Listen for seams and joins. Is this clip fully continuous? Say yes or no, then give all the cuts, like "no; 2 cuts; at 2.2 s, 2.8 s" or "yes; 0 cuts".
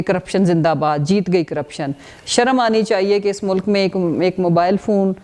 yes; 0 cuts